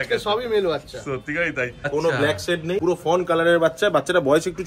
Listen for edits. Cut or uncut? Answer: cut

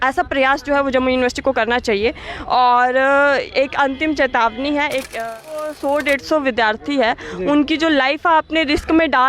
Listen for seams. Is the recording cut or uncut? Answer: cut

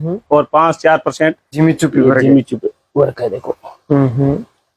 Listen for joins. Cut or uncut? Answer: cut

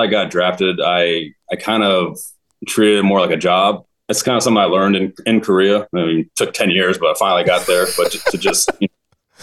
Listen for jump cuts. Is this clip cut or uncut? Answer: cut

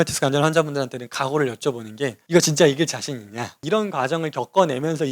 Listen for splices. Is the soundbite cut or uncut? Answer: cut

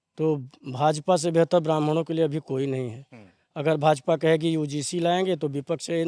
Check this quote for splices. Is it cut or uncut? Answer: uncut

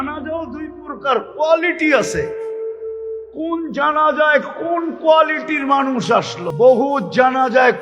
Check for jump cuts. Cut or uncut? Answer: cut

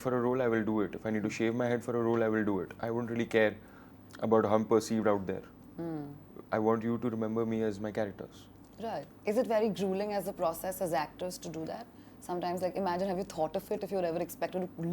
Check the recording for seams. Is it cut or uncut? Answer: uncut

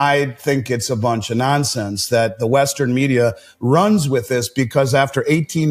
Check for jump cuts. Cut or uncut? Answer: uncut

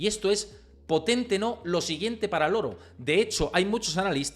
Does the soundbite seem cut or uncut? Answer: uncut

